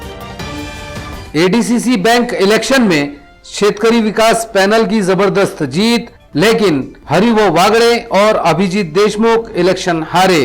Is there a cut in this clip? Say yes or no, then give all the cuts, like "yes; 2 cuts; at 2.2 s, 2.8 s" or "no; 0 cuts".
yes; 1 cut; at 1.2 s